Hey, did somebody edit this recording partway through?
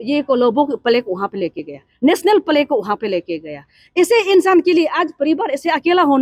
no; 0 cuts

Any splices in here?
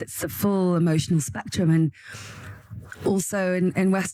no; 0 cuts

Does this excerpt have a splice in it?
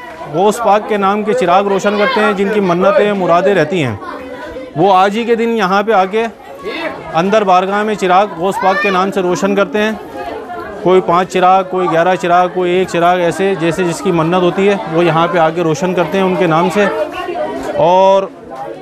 no; 0 cuts

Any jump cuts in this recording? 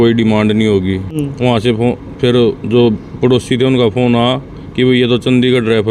yes; 1 cut; at 1.1 s

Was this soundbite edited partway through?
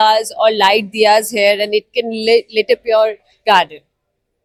no; 0 cuts

